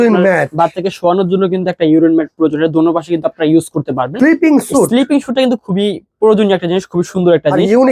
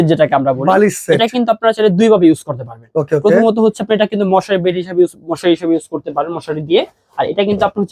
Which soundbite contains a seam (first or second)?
first